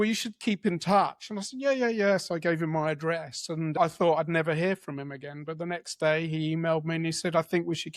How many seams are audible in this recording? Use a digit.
1